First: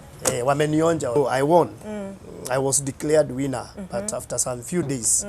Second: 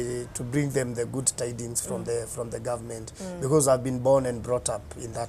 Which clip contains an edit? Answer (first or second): first